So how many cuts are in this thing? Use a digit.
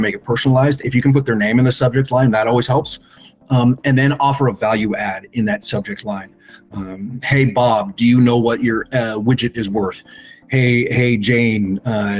0